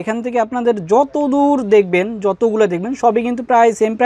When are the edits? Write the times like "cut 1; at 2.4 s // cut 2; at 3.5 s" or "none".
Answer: none